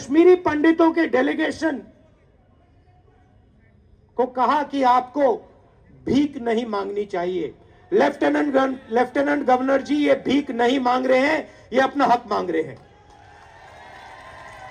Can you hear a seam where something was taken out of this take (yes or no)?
no